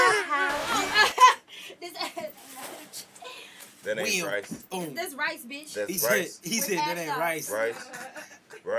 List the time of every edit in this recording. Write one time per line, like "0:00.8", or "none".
0:00.9